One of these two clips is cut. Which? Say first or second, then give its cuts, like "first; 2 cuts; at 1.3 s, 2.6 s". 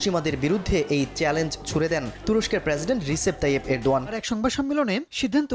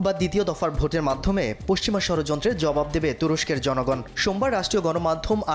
first; 1 cut; at 4.2 s